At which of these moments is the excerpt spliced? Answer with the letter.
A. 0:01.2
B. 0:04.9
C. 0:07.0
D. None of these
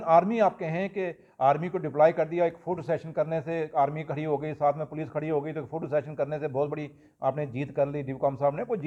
D